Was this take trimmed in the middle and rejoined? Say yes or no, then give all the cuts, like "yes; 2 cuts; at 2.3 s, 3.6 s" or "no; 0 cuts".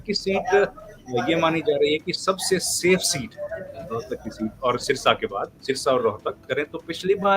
yes; 1 cut; at 6.5 s